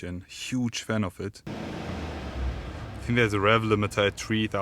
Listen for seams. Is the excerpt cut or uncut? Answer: cut